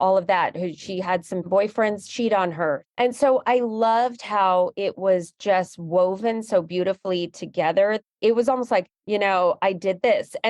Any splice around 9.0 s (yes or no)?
yes